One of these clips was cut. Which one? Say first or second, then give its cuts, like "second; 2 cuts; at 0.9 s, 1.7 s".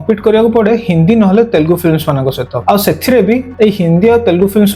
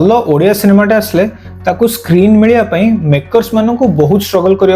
first; 2 cuts; at 2.5 s, 3.5 s